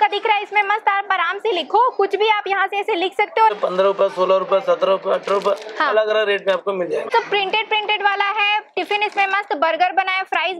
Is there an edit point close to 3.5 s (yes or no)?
yes